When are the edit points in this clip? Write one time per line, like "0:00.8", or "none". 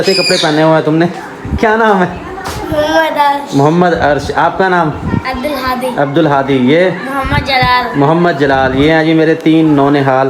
none